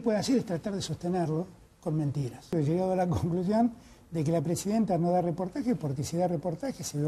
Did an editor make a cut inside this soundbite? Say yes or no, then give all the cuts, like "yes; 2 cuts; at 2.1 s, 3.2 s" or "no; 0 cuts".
yes; 1 cut; at 2.5 s